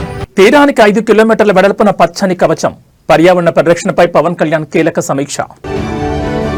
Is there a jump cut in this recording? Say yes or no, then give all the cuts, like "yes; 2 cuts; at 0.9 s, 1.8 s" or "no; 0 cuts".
no; 0 cuts